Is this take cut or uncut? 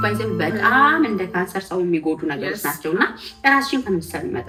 uncut